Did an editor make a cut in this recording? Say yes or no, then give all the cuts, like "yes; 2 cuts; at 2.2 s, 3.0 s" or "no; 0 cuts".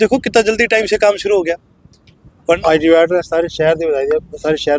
yes; 1 cut; at 2.6 s